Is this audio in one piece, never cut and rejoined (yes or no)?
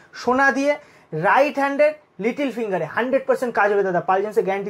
yes